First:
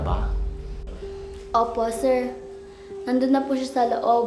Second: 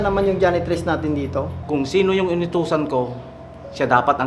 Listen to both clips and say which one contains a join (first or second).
second